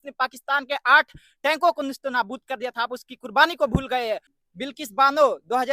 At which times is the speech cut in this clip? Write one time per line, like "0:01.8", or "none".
0:04.4